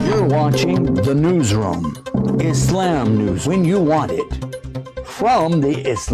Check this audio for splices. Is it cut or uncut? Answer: cut